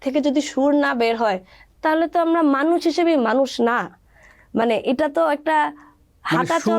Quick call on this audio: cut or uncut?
uncut